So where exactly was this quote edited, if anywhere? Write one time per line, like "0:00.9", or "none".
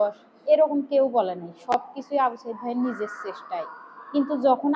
none